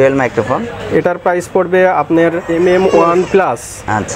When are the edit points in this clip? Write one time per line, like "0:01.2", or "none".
0:02.5